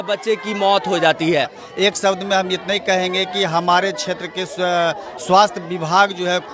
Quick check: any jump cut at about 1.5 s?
yes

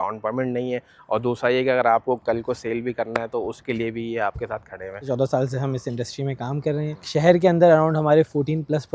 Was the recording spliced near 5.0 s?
yes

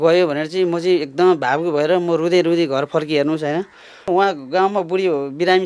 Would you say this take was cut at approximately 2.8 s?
no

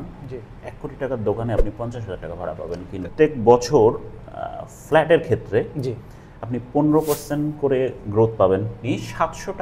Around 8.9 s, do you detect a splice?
yes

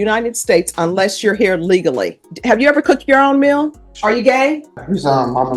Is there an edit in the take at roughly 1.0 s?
no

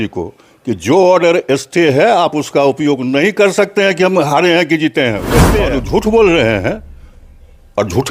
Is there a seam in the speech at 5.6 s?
yes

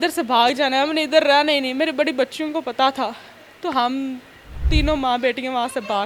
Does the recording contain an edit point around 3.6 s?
no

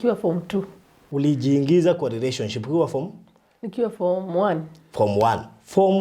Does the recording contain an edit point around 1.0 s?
yes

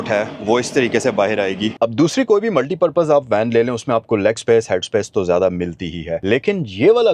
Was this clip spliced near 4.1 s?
no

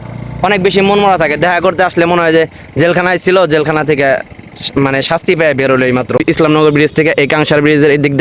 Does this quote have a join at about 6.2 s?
yes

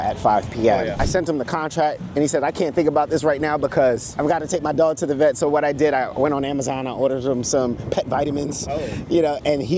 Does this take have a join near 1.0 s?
yes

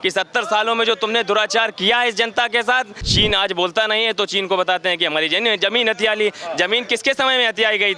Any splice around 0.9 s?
no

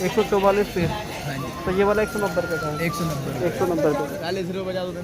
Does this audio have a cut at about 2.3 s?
no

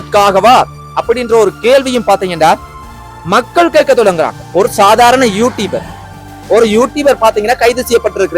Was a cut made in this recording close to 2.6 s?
no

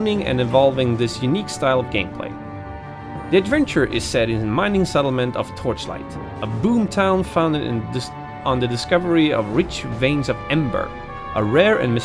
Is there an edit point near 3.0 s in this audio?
yes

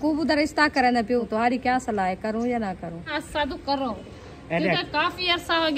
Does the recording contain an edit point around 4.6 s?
no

